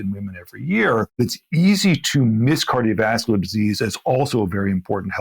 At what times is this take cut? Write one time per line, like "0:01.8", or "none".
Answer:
0:01.2